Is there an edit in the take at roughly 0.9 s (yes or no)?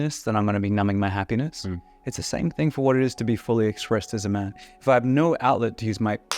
no